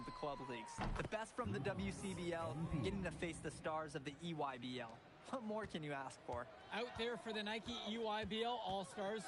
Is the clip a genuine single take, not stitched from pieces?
no; 1 cut; at 6.6 s

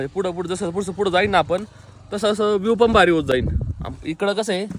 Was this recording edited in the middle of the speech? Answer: no; 0 cuts

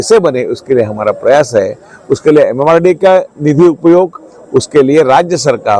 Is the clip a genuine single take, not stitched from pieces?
yes; 0 cuts

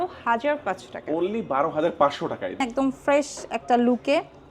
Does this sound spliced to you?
yes; 1 cut; at 2.6 s

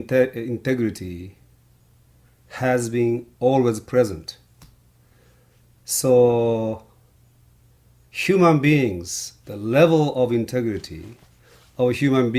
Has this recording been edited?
yes; 1 cut; at 6.4 s

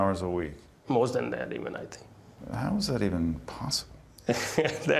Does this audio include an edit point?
yes; 1 cut; at 3.4 s

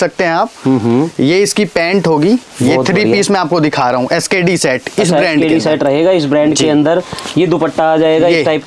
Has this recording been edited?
no; 0 cuts

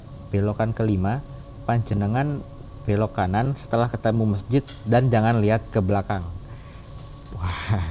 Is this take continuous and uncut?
yes; 0 cuts

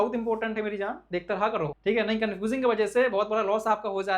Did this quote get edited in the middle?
yes; 1 cut; at 1.8 s

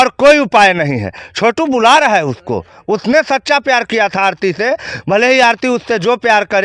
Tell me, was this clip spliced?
no; 0 cuts

